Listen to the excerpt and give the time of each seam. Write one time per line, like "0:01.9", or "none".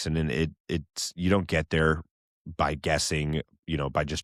none